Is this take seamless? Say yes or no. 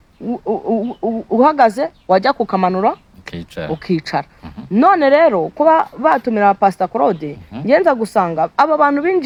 yes